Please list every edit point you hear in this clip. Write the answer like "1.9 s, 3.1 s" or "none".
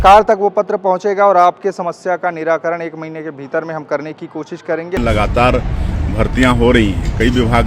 5.0 s

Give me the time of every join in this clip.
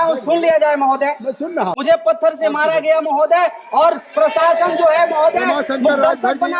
1.8 s

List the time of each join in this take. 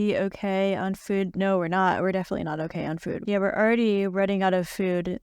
3.2 s

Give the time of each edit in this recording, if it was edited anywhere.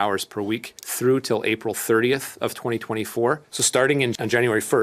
3.5 s

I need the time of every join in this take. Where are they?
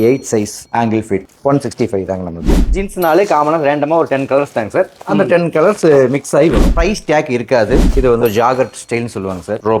2.4 s, 6.7 s, 7.8 s

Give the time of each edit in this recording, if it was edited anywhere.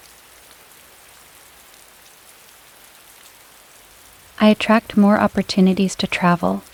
none

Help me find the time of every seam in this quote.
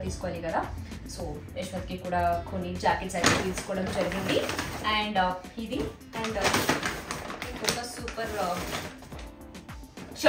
none

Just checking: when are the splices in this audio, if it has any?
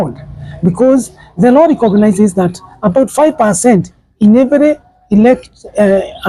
none

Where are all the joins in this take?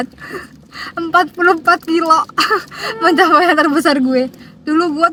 none

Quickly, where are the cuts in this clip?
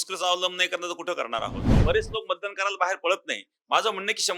1.7 s

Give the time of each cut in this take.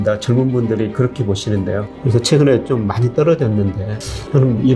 1.9 s

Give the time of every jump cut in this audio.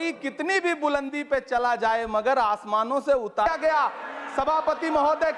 3.5 s

